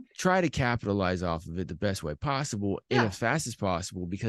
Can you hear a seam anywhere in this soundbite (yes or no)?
no